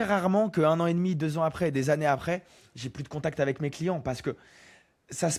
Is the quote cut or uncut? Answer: uncut